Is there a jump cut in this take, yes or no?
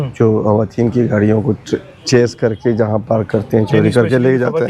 no